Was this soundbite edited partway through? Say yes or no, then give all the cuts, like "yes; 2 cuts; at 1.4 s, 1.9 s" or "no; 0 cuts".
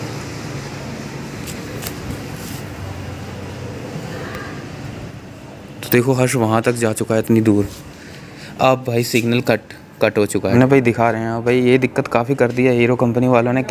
yes; 1 cut; at 10.5 s